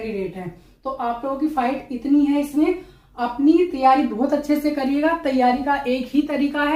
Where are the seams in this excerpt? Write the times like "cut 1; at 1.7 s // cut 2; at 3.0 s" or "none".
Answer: none

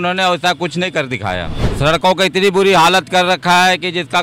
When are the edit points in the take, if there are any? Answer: cut 1; at 1.6 s

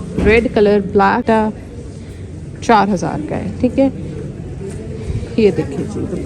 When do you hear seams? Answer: cut 1; at 1.2 s

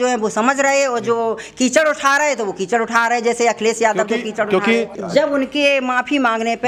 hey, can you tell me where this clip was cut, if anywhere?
none

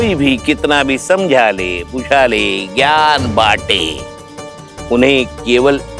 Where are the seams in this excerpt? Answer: none

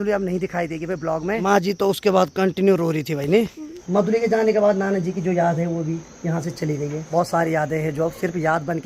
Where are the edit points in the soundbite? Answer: cut 1; at 1.4 s // cut 2; at 3.8 s // cut 3; at 7.0 s

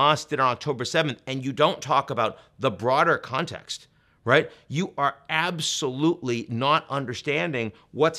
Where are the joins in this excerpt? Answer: none

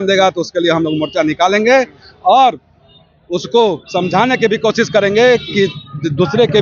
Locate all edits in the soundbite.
none

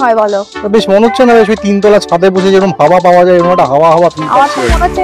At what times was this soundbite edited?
none

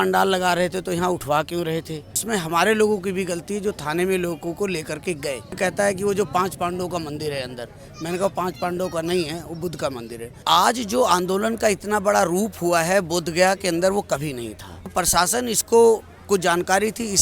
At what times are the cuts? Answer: cut 1; at 2.2 s // cut 2; at 5.6 s // cut 3; at 10.4 s // cut 4; at 14.9 s

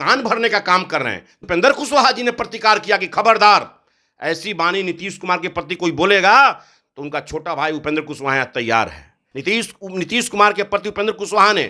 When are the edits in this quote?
cut 1; at 1.4 s // cut 2; at 9.3 s

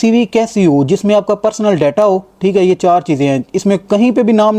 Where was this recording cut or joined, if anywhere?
none

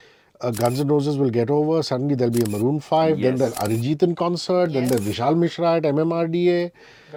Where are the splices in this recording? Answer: none

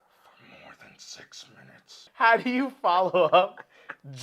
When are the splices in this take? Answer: cut 1; at 2.1 s

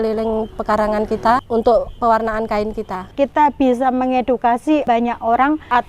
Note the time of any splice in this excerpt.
cut 1; at 1.4 s // cut 2; at 3.1 s // cut 3; at 4.8 s

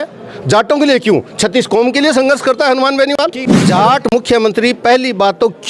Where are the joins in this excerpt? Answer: cut 1; at 3.6 s

